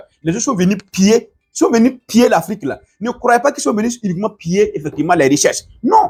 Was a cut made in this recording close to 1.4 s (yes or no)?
no